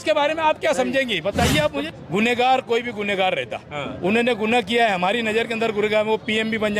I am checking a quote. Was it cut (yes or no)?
yes